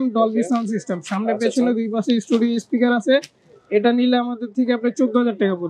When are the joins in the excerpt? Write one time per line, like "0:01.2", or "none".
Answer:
none